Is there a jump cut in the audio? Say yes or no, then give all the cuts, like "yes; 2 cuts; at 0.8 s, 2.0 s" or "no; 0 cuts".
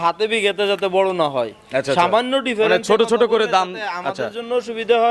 no; 0 cuts